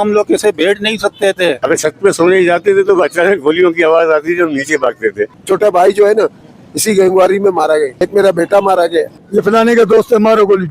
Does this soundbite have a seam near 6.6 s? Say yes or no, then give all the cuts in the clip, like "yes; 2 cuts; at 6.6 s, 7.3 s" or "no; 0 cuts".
no; 4 cuts; at 1.6 s, 5.4 s, 8.0 s, 9.2 s